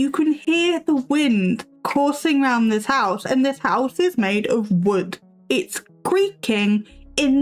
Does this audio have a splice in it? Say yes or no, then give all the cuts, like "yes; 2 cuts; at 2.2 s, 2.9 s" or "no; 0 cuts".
no; 0 cuts